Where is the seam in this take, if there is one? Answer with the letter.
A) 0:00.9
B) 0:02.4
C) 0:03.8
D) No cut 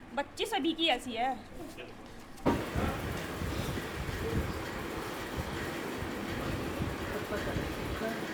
D